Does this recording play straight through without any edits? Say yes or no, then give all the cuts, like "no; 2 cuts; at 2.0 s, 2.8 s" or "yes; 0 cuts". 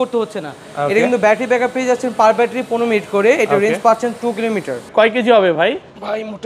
no; 1 cut; at 4.9 s